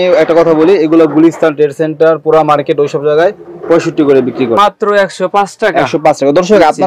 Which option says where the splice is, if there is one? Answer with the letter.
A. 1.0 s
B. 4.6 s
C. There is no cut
B